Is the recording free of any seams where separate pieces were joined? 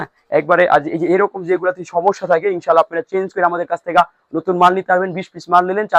yes; 0 cuts

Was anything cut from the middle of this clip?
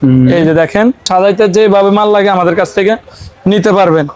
yes; 1 cut; at 1.0 s

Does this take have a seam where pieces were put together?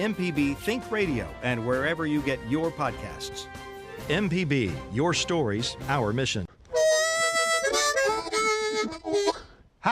yes; 1 cut; at 6.4 s

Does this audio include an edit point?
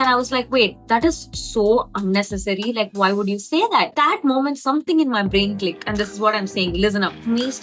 no; 0 cuts

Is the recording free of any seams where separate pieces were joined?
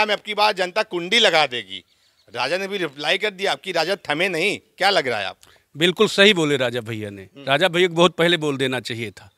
yes; 0 cuts

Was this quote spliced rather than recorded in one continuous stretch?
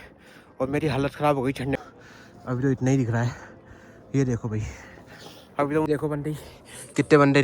yes; 2 cuts; at 1.8 s, 5.9 s

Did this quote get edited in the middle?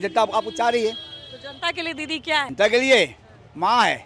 yes; 1 cut; at 2.5 s

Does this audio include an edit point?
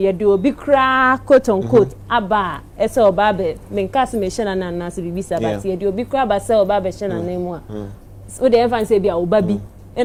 no; 0 cuts

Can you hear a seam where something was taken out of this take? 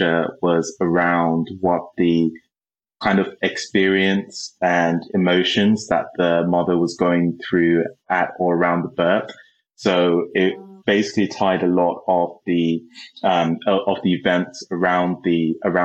yes; 1 cut; at 8.1 s

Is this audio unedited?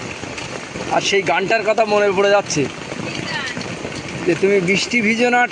yes; 0 cuts

